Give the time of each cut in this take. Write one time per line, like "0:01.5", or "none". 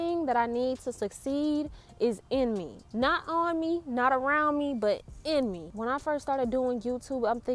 none